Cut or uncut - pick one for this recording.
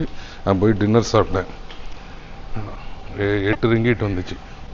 uncut